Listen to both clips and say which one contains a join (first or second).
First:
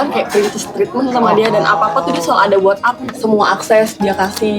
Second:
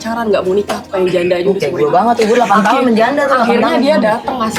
first